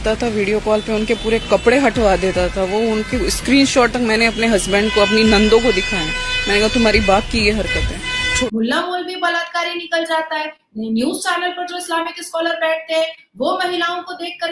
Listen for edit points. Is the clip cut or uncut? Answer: cut